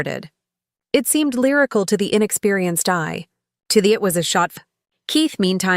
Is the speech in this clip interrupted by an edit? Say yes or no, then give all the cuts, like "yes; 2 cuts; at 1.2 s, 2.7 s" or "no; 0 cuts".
yes; 1 cut; at 4.5 s